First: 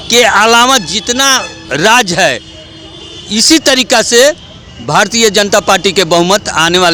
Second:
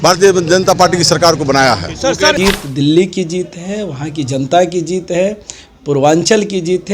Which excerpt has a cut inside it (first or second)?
second